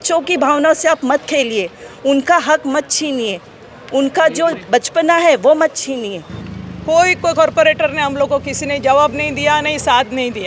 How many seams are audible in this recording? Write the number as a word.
one